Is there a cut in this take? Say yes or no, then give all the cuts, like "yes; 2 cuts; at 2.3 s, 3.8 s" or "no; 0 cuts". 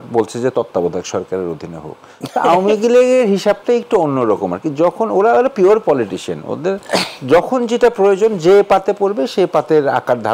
no; 0 cuts